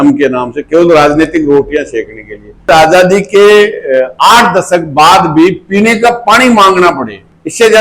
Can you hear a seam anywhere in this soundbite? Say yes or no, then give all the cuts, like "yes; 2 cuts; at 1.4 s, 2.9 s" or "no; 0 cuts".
yes; 1 cut; at 2.7 s